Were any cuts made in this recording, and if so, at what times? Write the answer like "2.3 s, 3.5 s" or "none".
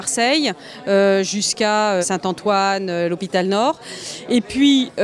2.1 s